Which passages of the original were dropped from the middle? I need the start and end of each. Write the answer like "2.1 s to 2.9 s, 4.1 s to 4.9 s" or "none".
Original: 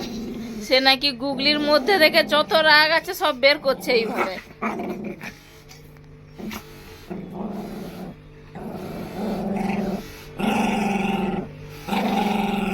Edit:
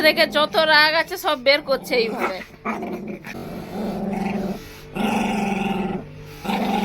5.4 s to 8.9 s